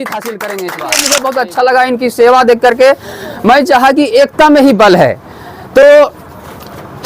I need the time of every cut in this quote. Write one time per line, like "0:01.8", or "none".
0:01.1